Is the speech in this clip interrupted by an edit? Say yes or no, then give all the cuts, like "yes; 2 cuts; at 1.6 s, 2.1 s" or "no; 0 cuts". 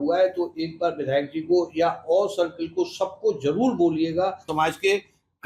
yes; 1 cut; at 4.5 s